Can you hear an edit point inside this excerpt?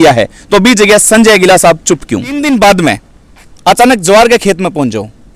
yes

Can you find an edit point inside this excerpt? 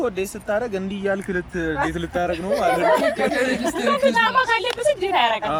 no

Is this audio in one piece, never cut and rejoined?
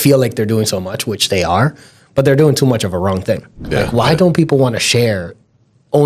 no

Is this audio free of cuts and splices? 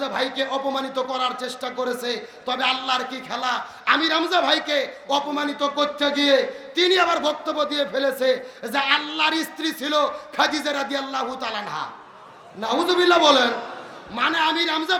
yes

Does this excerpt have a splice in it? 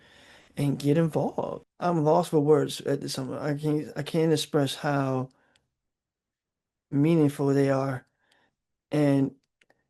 yes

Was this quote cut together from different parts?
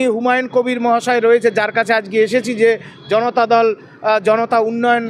no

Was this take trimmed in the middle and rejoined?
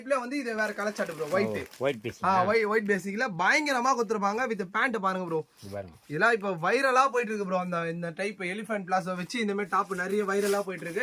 no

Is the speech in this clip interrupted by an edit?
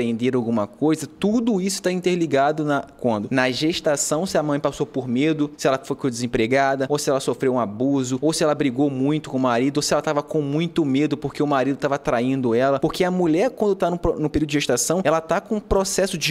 yes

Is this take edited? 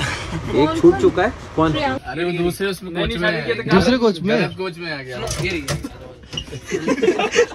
yes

